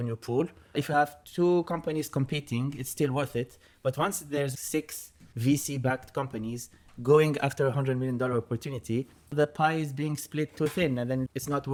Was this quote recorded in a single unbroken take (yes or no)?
yes